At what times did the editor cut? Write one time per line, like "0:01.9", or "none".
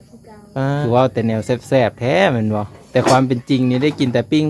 0:00.8
0:02.8